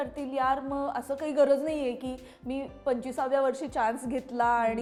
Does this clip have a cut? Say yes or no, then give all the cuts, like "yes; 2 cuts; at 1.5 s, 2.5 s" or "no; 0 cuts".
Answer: no; 0 cuts